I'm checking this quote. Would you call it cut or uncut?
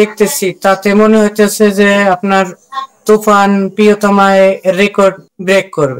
uncut